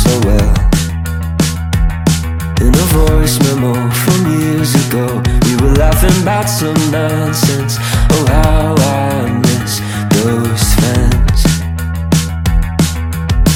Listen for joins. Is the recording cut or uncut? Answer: uncut